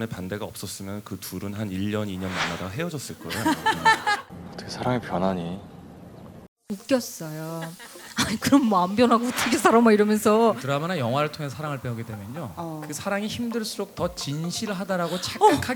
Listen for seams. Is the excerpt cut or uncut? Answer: cut